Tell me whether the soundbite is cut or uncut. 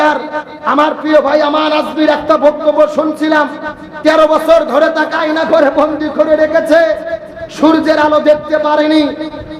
uncut